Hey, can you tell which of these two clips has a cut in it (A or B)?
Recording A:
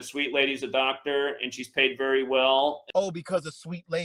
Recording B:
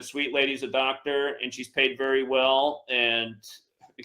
B